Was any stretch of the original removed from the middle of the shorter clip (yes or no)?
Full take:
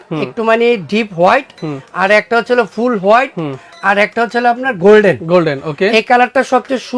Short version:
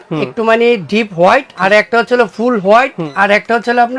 yes